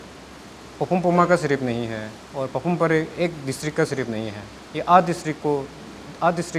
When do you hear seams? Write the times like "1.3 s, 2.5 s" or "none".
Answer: none